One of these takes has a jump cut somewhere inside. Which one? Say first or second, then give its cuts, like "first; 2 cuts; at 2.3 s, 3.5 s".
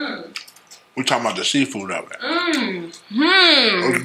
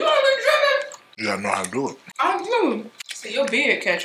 second; 3 cuts; at 1.0 s, 2.0 s, 3.3 s